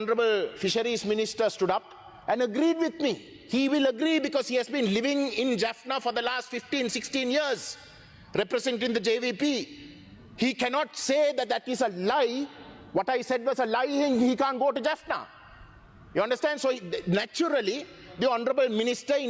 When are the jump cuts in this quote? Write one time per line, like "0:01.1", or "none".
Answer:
none